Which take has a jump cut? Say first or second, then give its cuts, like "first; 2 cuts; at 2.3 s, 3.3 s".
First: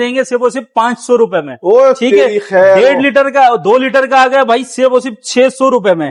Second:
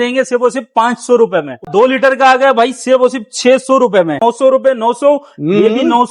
second; 2 cuts; at 1.6 s, 4.2 s